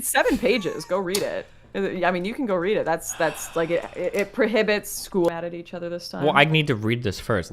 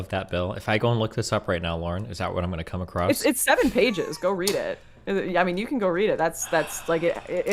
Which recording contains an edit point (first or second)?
first